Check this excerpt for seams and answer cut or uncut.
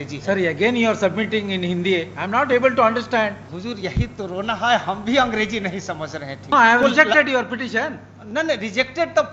cut